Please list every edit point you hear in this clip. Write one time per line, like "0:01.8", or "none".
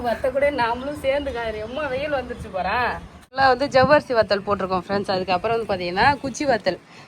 0:03.3